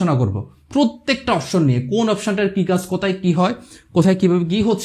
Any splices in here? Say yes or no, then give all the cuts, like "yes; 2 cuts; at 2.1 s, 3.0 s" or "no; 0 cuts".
no; 0 cuts